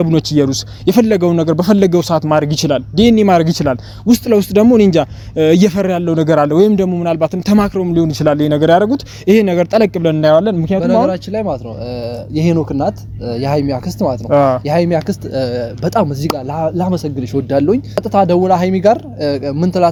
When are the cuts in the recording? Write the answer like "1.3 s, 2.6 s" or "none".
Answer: none